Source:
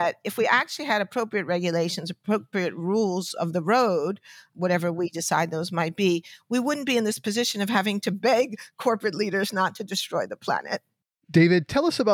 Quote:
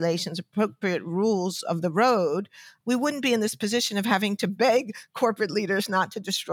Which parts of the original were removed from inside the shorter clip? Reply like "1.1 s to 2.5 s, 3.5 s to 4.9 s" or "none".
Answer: 4.4 s to 6.3 s